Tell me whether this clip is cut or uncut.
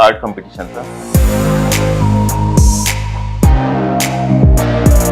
cut